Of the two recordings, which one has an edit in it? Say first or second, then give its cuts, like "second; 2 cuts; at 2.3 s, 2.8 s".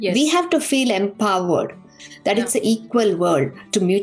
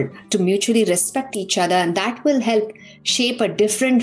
first; 1 cut; at 2.0 s